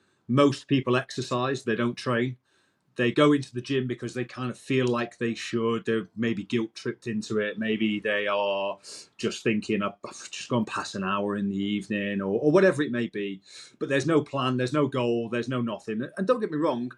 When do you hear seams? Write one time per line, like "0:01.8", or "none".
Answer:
none